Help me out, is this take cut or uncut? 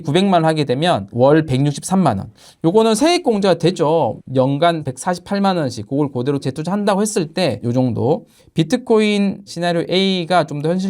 cut